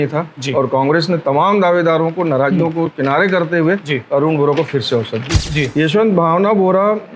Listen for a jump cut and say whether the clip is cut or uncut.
cut